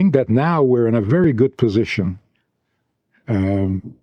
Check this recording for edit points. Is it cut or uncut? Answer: uncut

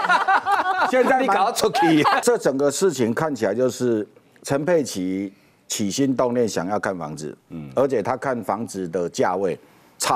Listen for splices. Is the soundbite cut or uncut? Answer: cut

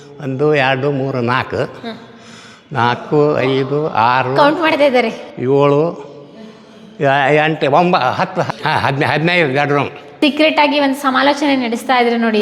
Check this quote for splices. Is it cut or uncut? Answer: cut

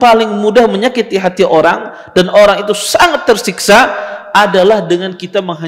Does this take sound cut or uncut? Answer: uncut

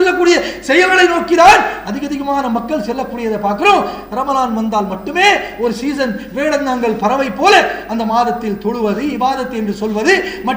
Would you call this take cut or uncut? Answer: uncut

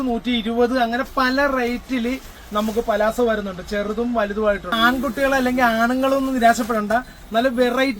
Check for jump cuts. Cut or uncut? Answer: cut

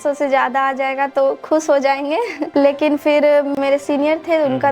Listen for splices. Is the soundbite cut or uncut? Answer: cut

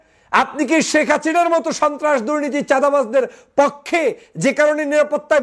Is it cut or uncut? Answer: uncut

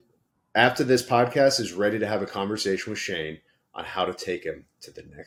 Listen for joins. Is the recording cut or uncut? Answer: uncut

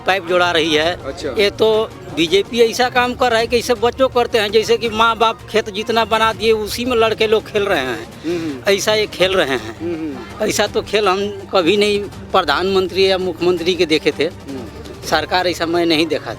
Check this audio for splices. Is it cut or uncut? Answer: uncut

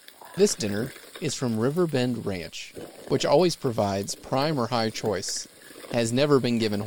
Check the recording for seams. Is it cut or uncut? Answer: uncut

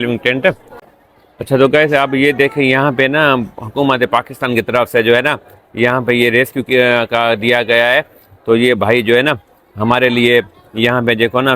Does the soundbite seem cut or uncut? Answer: cut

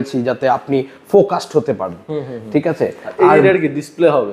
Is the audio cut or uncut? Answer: uncut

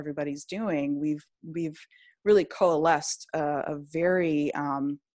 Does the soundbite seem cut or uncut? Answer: uncut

